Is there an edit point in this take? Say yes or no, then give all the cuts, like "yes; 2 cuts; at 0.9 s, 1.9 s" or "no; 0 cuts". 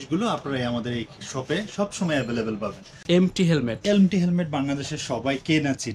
yes; 1 cut; at 2.9 s